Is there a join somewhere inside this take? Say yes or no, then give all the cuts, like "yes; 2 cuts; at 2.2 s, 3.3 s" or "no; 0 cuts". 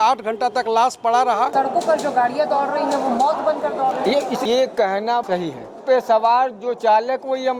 yes; 2 cuts; at 1.5 s, 5.8 s